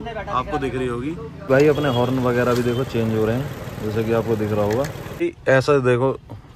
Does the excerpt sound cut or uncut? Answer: cut